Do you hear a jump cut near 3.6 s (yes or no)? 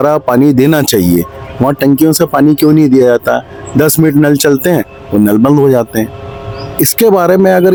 no